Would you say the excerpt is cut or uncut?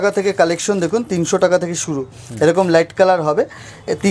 uncut